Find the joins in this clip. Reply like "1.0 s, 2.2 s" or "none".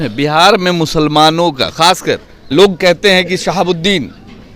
2.5 s